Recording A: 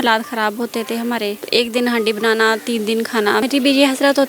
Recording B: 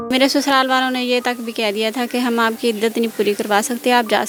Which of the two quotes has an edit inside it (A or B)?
A